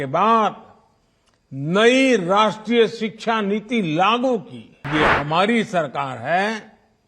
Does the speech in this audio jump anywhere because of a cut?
yes; 1 cut; at 4.9 s

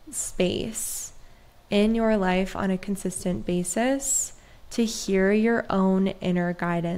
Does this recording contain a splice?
no; 0 cuts

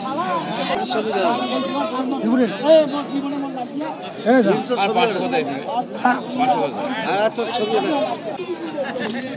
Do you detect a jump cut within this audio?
yes; 2 cuts; at 0.8 s, 8.3 s

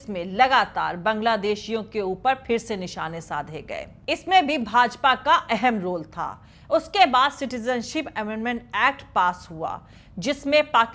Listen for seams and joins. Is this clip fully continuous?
yes; 0 cuts

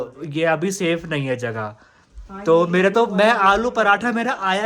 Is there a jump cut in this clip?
no; 0 cuts

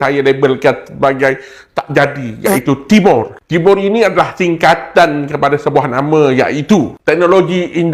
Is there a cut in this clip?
no; 0 cuts

